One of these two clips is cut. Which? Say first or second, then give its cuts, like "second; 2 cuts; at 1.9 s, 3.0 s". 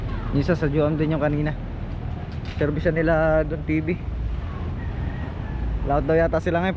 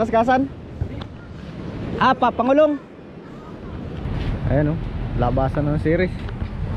second; 1 cut; at 4.1 s